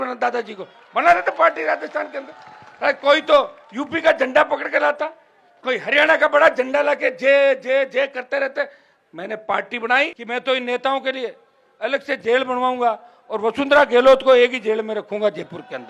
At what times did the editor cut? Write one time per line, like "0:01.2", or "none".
0:10.1